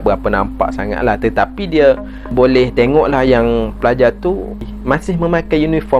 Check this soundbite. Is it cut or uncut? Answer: cut